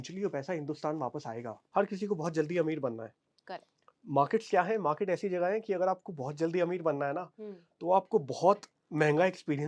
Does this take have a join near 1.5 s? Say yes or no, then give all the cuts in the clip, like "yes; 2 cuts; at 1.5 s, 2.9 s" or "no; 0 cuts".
yes; 1 cut; at 1.5 s